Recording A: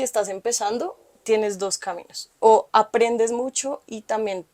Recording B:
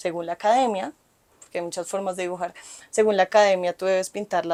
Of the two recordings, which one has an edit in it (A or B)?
A